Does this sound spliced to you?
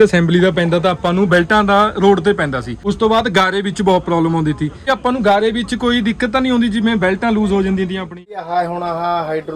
yes; 3 cuts; at 2.7 s, 4.9 s, 8.2 s

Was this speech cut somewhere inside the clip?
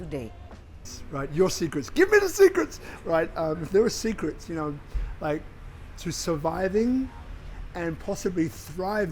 yes; 1 cut; at 0.9 s

